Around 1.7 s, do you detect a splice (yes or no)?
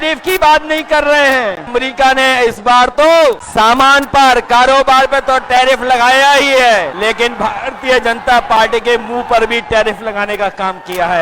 yes